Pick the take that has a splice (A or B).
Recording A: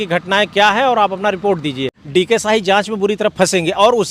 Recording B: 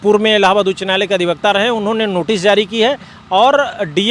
A